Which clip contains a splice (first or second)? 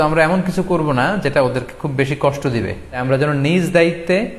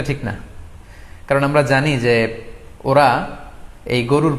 first